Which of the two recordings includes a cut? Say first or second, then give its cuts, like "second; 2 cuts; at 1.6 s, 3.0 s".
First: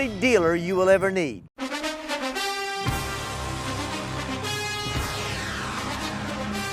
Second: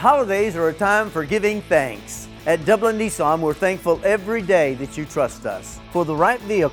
first; 1 cut; at 1.5 s